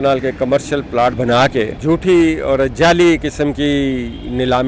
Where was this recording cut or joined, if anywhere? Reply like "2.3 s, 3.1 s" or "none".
1.1 s, 1.8 s